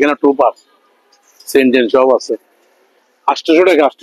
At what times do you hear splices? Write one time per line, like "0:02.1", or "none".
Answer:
none

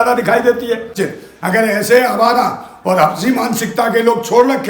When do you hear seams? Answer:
0:00.9

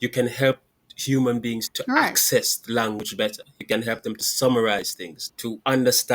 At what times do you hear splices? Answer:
0:01.7

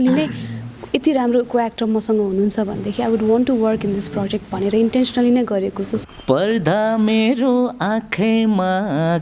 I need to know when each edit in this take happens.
0:06.0

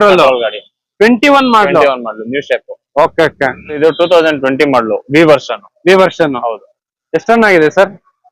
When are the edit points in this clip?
0:03.8

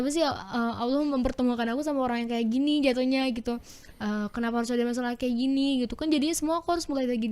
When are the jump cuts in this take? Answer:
none

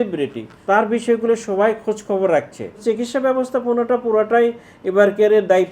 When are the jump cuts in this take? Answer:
0:02.8

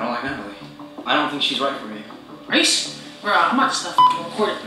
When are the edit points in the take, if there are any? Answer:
0:00.9

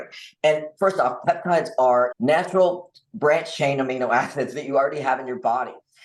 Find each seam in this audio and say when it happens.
0:02.1

